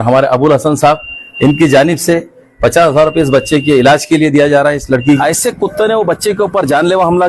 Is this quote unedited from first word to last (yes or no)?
no